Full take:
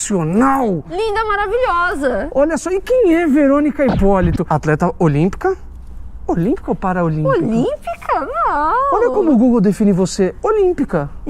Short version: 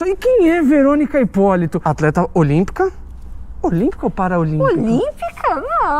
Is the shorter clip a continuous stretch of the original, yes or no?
yes